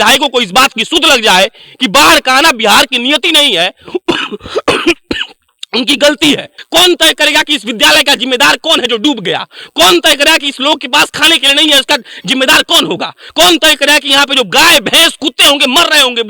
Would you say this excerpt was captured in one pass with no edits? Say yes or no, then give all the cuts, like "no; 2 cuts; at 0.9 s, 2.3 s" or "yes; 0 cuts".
no; 1 cut; at 6.5 s